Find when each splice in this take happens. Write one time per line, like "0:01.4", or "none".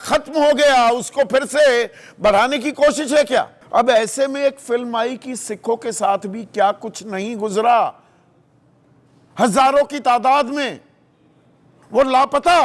0:03.6